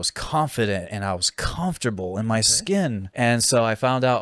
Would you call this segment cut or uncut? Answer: cut